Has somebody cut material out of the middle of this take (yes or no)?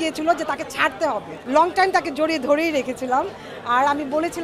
yes